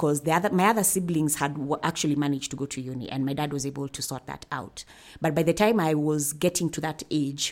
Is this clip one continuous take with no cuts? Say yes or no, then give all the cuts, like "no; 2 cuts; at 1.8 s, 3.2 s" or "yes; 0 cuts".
yes; 0 cuts